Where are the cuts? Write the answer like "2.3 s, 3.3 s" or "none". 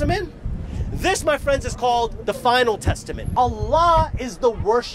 3.2 s